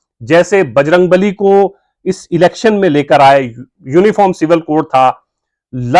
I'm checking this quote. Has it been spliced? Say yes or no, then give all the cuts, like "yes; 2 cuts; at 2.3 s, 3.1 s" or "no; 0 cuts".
no; 0 cuts